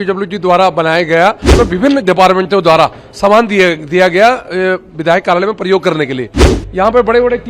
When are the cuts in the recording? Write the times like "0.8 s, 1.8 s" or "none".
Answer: 1.5 s, 6.5 s